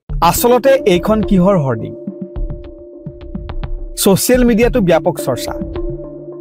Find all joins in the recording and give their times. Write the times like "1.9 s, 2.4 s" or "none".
5.4 s